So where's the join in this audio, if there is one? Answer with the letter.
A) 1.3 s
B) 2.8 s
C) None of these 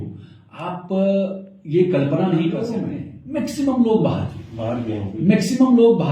B